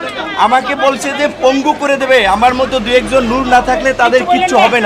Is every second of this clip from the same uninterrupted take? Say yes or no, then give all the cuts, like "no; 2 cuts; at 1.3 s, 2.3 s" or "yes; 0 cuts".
yes; 0 cuts